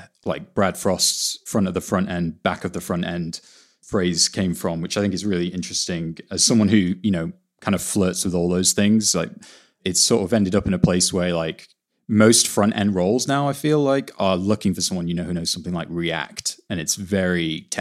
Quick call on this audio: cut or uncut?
cut